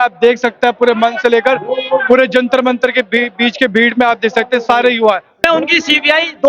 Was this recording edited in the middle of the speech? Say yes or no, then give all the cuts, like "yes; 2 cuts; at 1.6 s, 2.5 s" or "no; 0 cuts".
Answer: yes; 1 cut; at 5.4 s